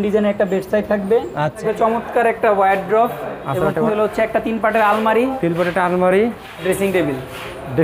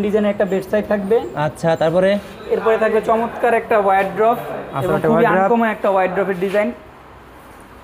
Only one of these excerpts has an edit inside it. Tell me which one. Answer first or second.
first